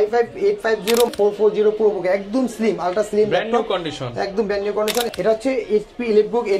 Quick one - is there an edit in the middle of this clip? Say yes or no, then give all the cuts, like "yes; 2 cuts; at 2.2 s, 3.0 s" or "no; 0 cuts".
yes; 2 cuts; at 1.1 s, 5.1 s